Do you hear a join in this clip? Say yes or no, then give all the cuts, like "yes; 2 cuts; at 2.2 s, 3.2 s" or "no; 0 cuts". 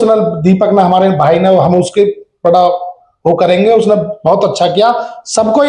no; 0 cuts